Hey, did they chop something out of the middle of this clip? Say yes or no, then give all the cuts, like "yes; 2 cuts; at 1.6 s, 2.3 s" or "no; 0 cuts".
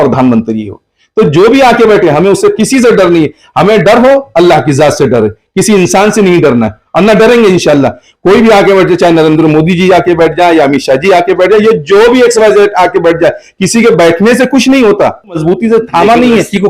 yes; 1 cut; at 15.4 s